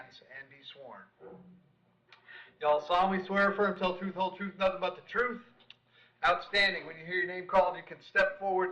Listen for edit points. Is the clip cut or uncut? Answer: cut